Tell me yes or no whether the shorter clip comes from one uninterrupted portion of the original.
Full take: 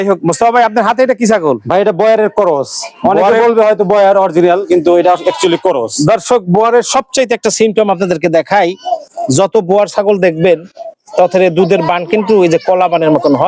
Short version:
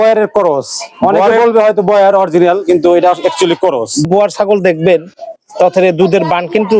no